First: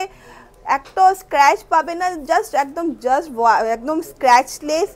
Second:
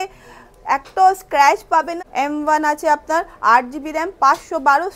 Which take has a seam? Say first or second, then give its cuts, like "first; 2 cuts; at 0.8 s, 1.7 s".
second; 1 cut; at 1.9 s